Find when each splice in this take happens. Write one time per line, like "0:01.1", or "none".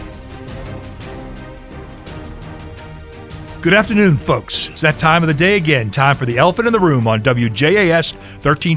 0:03.6